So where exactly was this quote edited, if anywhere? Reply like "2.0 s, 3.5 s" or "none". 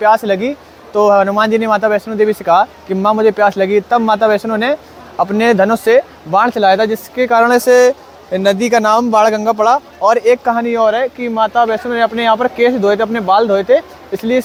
none